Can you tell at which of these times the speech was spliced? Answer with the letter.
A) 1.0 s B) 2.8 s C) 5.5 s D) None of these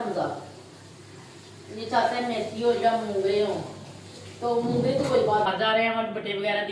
C